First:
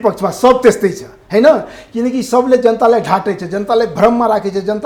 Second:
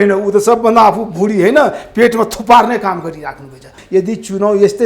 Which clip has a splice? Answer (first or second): second